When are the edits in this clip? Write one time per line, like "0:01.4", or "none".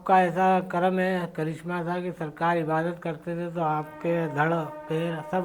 none